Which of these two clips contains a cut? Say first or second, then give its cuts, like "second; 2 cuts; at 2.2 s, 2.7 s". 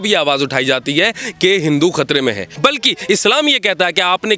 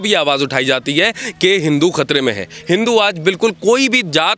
first; 1 cut; at 2.5 s